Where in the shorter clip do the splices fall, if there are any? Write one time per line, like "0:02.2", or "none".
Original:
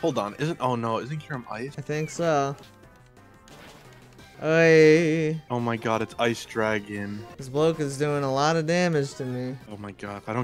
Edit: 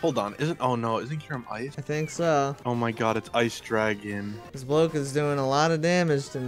0:02.6